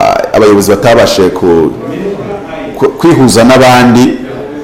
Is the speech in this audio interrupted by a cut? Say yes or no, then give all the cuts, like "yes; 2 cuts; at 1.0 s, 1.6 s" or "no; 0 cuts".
no; 0 cuts